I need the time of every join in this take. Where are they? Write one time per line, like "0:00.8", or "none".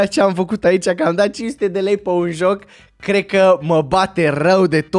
none